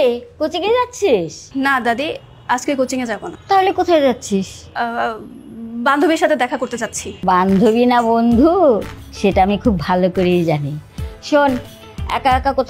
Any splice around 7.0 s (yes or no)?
yes